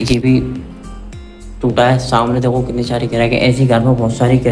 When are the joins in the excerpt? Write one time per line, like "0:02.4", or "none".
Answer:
none